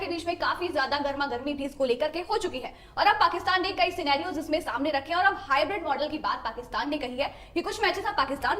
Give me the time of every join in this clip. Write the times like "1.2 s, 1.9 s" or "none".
none